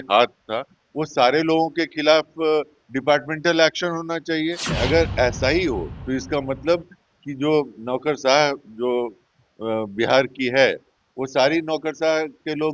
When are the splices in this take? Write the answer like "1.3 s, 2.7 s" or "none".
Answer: 4.7 s

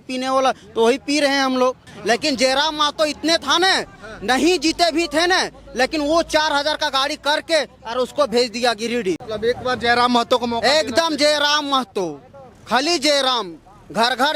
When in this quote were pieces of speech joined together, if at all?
1.9 s, 9.3 s

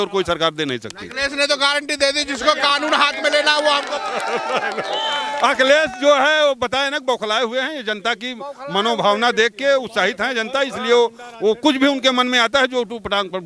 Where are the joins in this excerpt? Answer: none

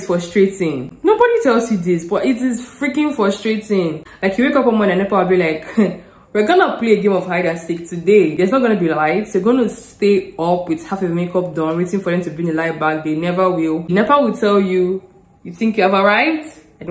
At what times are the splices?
4.1 s, 13.9 s

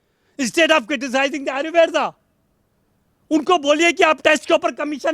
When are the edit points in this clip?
none

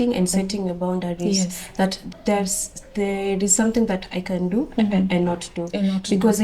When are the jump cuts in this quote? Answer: 2.0 s

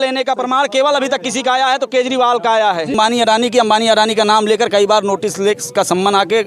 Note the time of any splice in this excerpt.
2.9 s

